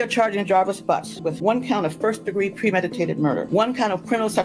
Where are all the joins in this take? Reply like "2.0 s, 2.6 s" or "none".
1.2 s, 3.5 s